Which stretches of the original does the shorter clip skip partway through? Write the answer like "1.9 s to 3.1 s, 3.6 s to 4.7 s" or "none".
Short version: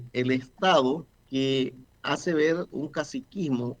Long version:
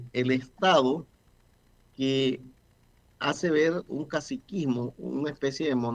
1.2 s to 1.8 s, 2.5 s to 3.0 s